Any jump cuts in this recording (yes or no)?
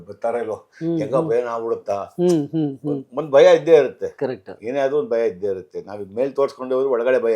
no